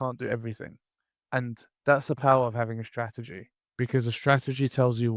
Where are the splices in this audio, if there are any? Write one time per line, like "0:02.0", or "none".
none